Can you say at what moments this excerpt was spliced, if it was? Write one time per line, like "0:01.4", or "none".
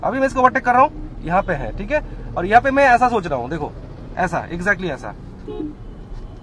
none